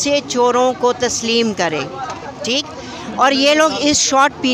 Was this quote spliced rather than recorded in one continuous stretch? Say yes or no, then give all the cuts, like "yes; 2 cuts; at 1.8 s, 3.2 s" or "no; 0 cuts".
no; 0 cuts